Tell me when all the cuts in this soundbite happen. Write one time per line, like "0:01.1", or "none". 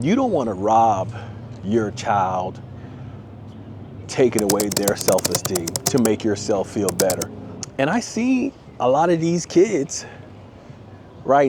0:07.4